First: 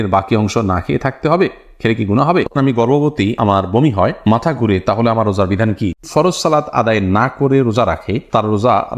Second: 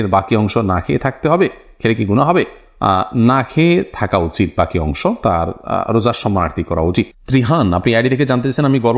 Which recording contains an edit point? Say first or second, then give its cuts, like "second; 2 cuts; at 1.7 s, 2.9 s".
first; 2 cuts; at 2.5 s, 6.0 s